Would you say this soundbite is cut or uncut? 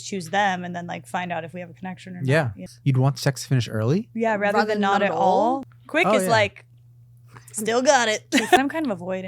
cut